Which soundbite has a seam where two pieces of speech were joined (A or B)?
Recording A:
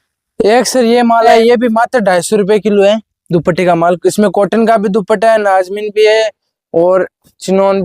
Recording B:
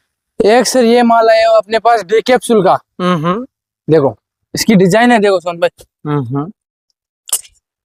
A